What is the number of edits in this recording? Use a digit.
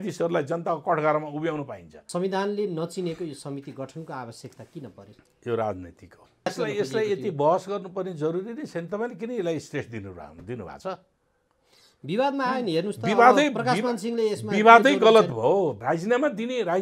3